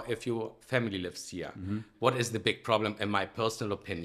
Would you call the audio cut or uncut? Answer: cut